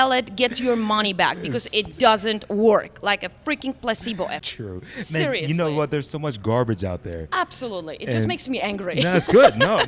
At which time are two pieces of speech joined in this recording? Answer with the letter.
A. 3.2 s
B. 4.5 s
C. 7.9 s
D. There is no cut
B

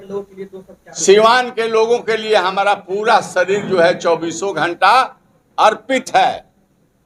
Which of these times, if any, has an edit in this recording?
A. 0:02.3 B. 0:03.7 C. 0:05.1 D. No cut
D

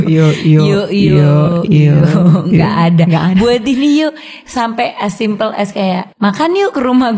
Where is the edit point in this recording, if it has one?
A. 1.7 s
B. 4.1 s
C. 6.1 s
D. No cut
C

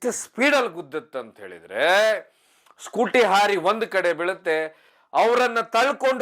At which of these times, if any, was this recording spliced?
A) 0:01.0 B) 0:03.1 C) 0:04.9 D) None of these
C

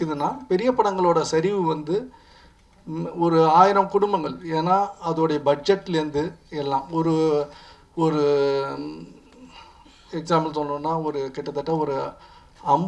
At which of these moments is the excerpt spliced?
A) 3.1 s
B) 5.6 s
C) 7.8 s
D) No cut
D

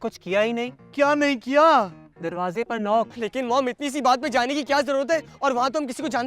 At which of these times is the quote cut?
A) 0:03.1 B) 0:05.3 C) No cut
A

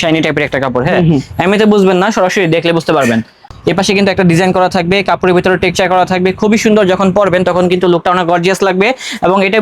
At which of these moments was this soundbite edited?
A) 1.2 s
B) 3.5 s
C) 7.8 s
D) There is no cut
B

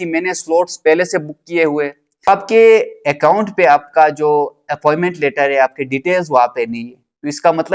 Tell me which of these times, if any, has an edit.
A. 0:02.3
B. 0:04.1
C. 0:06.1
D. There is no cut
A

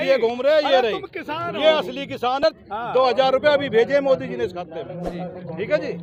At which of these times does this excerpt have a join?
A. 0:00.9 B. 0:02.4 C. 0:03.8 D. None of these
D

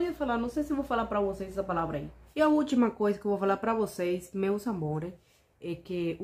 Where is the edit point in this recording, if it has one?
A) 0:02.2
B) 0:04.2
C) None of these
A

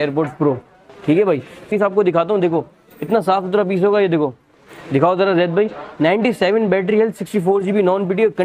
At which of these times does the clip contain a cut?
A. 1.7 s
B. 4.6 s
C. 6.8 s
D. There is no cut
A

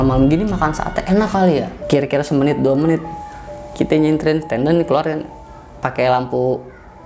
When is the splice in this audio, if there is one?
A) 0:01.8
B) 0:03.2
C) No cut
A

